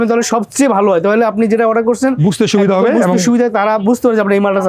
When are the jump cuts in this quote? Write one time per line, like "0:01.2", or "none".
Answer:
none